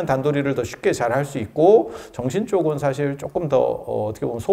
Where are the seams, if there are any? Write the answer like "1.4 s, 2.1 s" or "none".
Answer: none